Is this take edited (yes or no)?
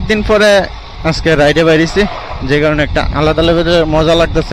no